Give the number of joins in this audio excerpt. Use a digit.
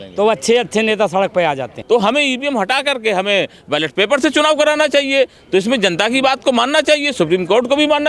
1